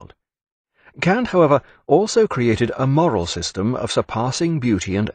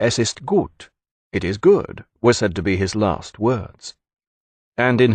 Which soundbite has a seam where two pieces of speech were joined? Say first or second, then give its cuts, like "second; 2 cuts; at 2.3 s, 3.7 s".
first; 1 cut; at 3.4 s